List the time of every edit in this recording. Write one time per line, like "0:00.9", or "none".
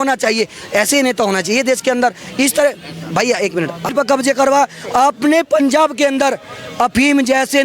0:03.9